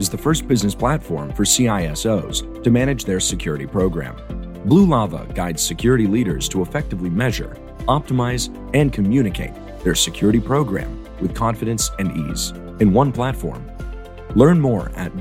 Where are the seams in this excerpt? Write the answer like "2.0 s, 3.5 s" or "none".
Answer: none